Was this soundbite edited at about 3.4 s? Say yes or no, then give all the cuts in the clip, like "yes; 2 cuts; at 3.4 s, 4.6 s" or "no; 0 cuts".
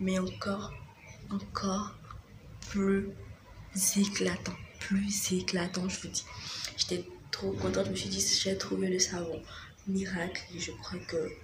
no; 0 cuts